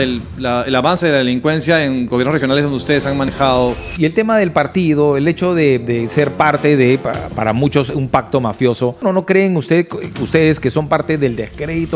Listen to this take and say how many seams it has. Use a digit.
2